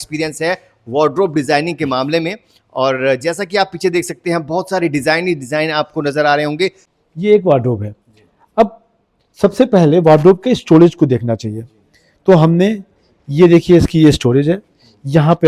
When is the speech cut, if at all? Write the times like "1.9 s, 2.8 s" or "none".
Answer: 6.9 s